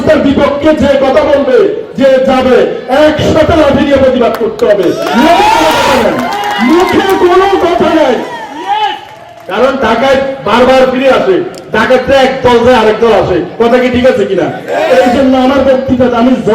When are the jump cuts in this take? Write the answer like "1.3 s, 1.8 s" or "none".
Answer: none